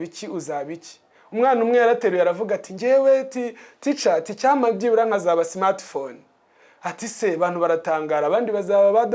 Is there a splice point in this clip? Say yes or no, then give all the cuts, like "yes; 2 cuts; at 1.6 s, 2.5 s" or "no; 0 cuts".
no; 0 cuts